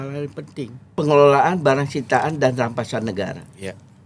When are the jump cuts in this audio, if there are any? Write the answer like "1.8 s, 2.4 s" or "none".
1.0 s